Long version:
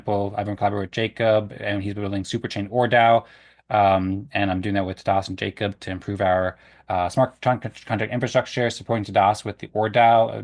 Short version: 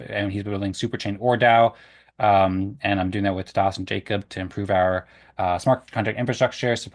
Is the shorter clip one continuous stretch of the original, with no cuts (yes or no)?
no